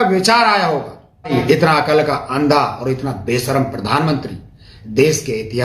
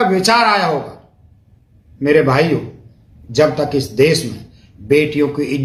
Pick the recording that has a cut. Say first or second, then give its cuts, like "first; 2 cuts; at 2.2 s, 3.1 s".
first; 1 cut; at 1.3 s